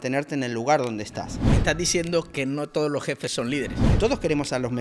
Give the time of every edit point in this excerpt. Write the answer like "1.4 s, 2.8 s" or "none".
1.4 s, 3.9 s